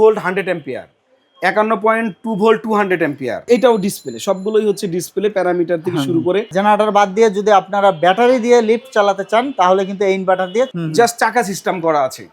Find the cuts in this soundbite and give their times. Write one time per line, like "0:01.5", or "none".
0:03.5
0:06.5
0:10.7